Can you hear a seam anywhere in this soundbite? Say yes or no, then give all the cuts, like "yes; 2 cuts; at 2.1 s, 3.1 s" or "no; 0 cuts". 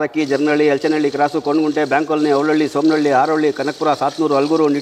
no; 0 cuts